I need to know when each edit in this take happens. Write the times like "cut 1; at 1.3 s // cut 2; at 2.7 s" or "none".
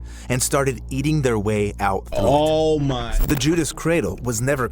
cut 1; at 3.0 s